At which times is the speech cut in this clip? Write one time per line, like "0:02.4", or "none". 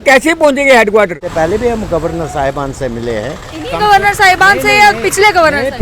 0:01.2